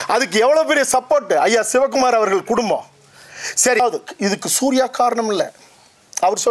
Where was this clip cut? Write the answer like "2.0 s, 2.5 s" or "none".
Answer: 3.8 s